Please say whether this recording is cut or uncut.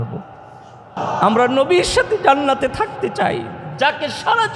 cut